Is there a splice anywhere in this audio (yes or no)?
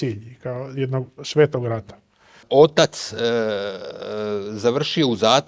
yes